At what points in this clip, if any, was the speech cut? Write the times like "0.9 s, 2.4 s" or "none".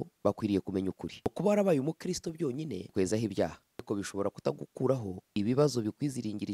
1.3 s, 2.9 s, 3.9 s, 5.2 s